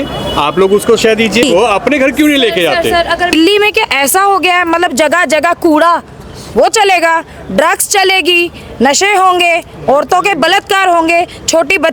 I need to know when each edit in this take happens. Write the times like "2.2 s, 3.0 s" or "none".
1.4 s, 3.3 s